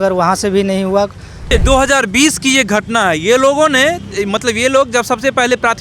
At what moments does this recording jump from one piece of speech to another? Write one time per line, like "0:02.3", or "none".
0:01.5